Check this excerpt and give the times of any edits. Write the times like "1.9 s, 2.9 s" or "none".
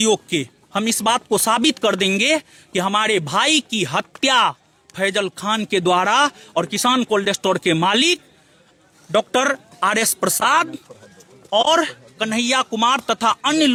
none